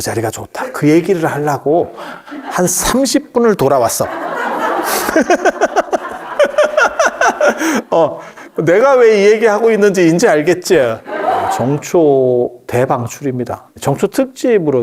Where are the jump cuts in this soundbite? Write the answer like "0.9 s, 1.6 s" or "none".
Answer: 11.6 s, 13.8 s